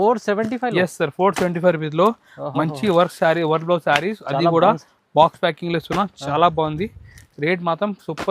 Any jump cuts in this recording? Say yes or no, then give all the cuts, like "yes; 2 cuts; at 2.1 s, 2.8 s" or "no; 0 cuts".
no; 0 cuts